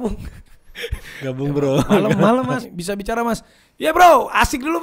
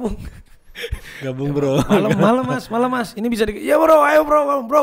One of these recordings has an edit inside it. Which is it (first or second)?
first